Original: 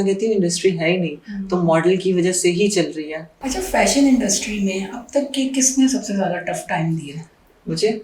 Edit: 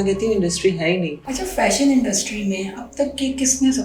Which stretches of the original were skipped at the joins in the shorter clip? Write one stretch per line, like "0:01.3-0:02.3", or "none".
0:01.2-0:03.4